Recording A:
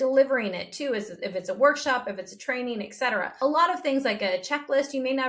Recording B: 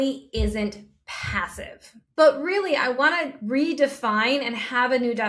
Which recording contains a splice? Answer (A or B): A